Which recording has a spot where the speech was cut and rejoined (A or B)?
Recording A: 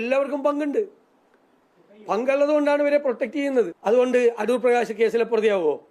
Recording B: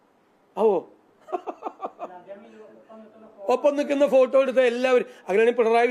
A